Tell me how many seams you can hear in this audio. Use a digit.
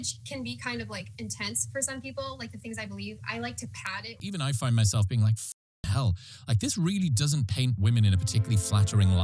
1